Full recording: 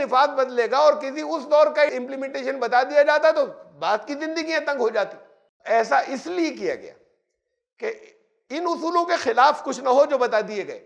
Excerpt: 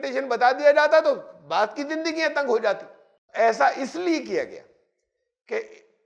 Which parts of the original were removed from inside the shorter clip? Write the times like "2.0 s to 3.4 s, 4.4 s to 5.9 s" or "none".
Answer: none